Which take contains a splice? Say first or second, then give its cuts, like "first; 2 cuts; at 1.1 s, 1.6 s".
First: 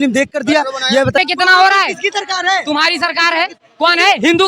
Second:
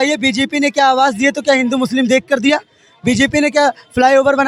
first; 1 cut; at 1.2 s